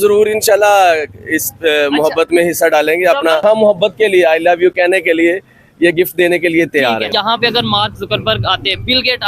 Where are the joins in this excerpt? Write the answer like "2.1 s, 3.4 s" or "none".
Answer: 3.4 s, 7.1 s